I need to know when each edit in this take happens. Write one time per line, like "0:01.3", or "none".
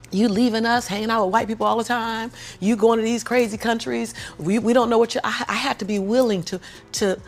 none